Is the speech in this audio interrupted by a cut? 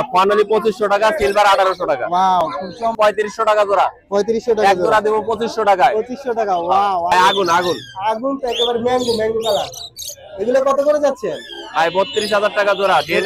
yes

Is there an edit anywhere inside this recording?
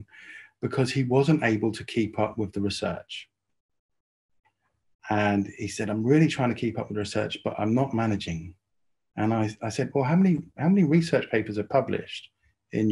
no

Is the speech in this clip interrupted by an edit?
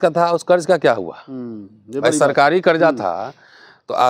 no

